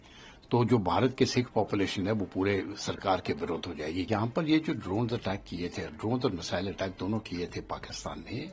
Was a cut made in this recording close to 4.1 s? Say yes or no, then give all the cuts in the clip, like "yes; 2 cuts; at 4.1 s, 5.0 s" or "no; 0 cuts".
yes; 1 cut; at 4.1 s